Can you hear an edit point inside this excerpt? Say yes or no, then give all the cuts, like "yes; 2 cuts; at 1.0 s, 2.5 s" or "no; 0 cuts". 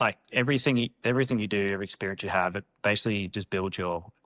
no; 0 cuts